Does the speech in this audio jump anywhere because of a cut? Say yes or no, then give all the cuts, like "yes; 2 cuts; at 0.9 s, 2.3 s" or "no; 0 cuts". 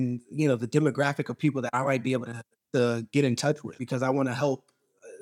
yes; 1 cut; at 3.8 s